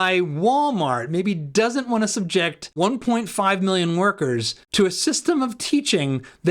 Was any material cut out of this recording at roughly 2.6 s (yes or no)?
yes